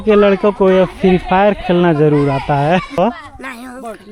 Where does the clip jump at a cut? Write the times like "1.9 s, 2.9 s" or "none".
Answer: 3.0 s